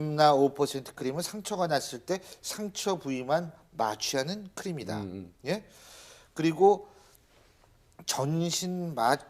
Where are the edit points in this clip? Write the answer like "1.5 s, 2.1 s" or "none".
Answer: none

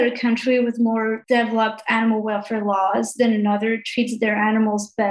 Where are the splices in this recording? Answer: 1.2 s

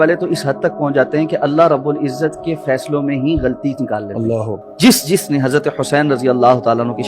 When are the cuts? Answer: 4.7 s

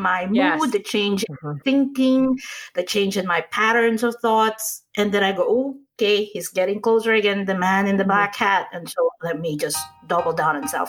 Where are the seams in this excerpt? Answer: 9.9 s

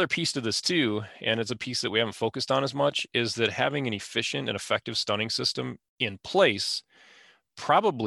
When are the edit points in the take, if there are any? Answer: 5.8 s

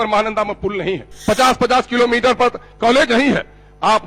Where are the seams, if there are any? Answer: 1.1 s

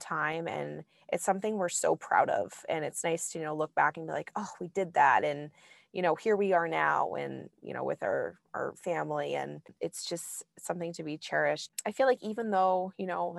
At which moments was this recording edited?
9.7 s, 11.6 s

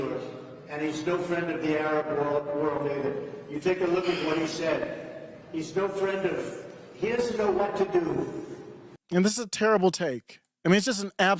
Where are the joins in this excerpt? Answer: 9.0 s

